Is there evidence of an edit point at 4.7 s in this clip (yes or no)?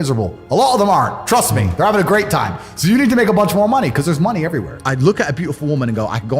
yes